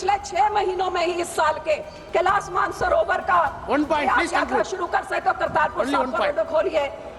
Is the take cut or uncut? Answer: cut